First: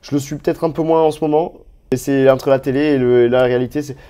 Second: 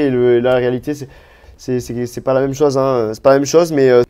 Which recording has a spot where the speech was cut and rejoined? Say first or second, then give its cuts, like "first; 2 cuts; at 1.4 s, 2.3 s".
first; 1 cut; at 2.0 s